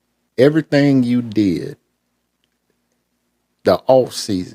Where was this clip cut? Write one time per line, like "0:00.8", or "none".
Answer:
none

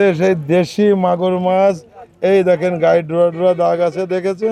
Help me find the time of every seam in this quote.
none

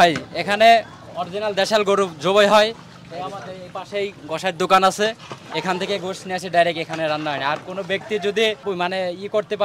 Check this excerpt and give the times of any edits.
0:08.6

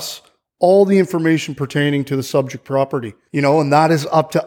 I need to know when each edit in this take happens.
0:03.2

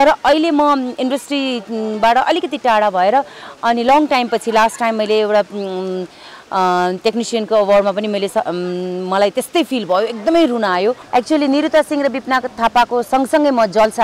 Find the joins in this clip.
0:11.0

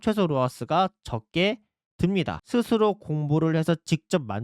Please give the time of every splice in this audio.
0:02.4

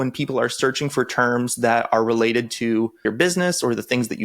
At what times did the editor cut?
0:03.0

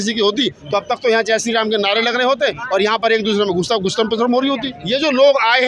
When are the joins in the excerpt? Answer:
0:04.7

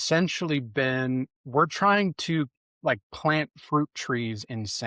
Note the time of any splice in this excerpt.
0:01.4

